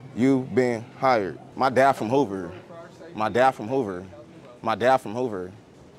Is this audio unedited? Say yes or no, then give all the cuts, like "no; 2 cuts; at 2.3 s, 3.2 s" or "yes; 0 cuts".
no; 1 cut; at 1.4 s